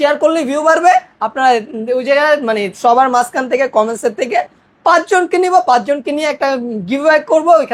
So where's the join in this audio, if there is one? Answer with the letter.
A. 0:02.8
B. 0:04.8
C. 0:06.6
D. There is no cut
D